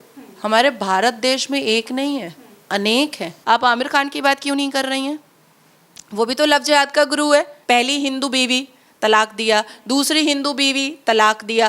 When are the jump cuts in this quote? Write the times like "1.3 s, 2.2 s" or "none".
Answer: 3.3 s, 7.5 s